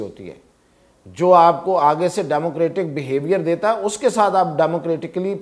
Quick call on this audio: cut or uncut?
uncut